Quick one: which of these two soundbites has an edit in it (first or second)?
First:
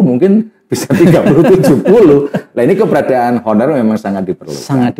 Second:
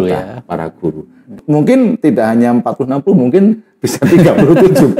second